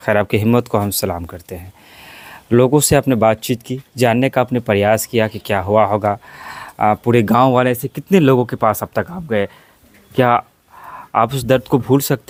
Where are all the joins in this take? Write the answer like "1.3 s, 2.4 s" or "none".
none